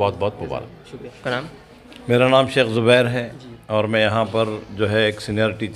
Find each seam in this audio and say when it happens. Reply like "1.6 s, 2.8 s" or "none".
none